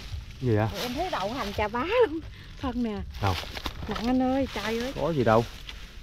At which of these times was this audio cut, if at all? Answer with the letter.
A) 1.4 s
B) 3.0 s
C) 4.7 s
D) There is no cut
C